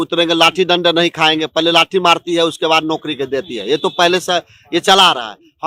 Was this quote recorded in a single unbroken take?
yes; 0 cuts

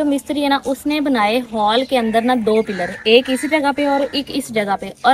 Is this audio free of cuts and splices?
yes; 0 cuts

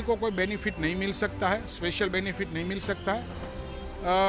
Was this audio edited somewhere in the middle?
no; 0 cuts

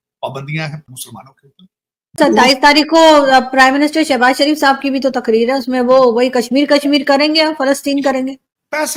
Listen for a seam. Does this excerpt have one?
no; 0 cuts

